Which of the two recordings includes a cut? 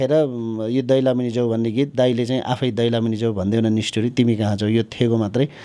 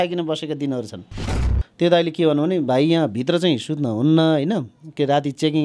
second; 1 cut; at 1.3 s

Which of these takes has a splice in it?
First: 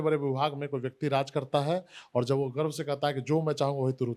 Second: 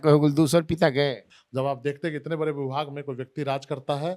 second; 1 cut; at 1.3 s

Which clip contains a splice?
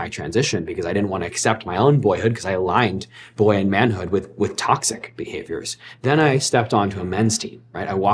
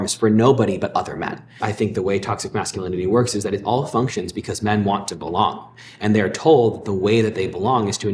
second; 1 cut; at 1.6 s

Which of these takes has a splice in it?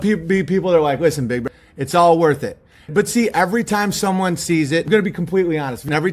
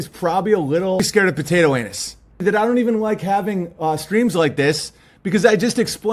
first; 2 cuts; at 1.4 s, 2.8 s

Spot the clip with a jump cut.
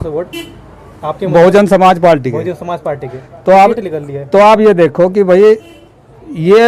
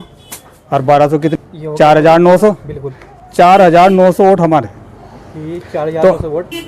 second; 1 cut; at 1.3 s

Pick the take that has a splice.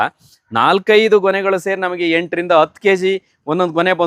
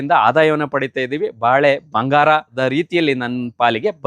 second; 1 cut; at 2.5 s

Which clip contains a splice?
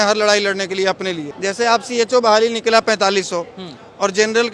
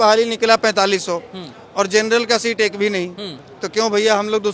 first; 1 cut; at 1.3 s

